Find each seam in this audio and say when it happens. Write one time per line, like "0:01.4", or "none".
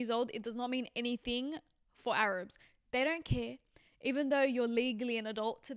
none

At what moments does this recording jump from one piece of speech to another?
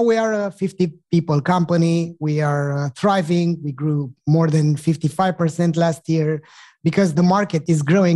0:07.1

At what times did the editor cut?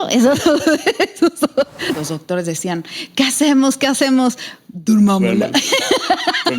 0:01.9

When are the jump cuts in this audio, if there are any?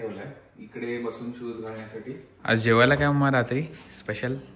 0:02.4

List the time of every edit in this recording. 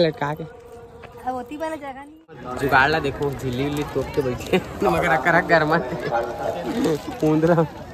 0:02.5

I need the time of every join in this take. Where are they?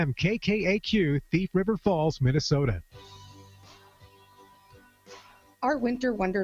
0:02.7

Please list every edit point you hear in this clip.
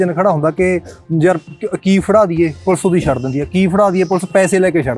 none

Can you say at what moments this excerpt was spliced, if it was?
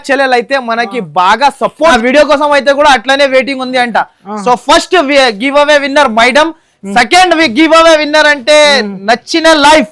0:01.9

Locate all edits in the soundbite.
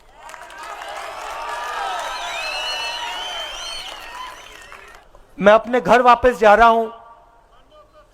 0:04.9

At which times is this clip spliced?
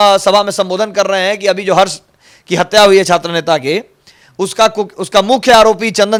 none

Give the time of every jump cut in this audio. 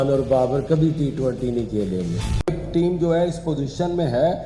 0:02.5

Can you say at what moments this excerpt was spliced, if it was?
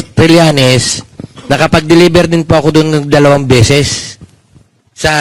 none

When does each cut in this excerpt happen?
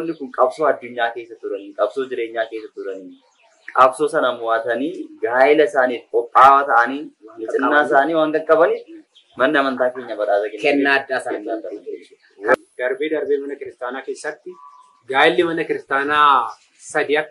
0:12.5

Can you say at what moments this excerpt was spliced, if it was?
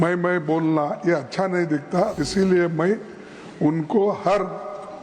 0:02.2

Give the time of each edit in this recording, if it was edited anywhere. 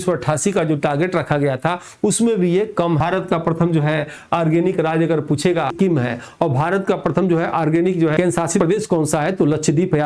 0:03.0
0:05.7
0:08.5

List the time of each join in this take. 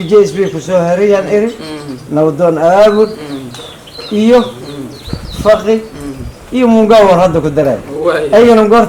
none

